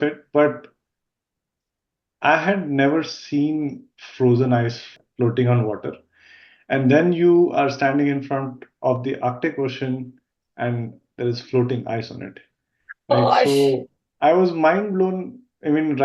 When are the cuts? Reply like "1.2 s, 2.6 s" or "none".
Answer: 4.9 s